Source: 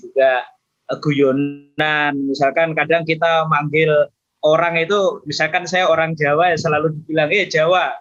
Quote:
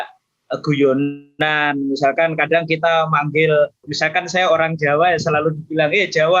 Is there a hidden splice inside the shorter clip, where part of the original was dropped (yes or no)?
yes